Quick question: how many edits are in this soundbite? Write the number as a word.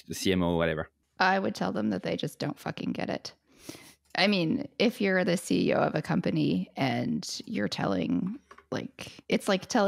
zero